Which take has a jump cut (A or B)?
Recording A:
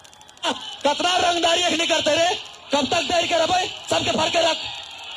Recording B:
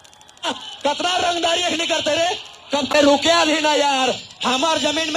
B